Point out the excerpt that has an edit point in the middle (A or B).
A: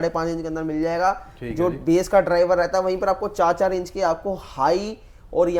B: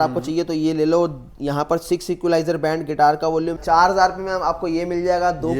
B